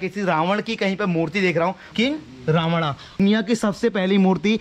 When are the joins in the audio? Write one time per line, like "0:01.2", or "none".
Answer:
0:01.9
0:03.2